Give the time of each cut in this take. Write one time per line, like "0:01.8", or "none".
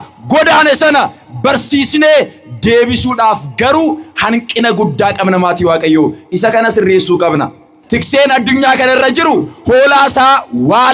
0:07.8